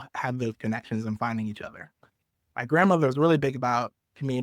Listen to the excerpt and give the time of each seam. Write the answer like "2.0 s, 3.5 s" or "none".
2.4 s